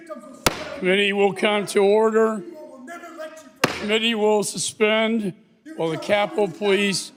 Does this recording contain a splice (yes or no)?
no